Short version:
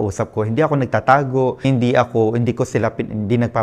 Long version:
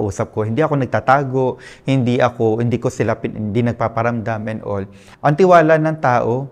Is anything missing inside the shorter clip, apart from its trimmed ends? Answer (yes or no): yes